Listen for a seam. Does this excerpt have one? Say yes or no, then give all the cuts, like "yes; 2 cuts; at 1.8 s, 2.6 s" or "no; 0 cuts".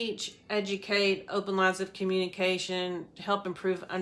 no; 0 cuts